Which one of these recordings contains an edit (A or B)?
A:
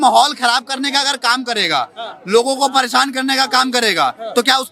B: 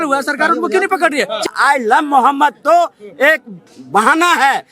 B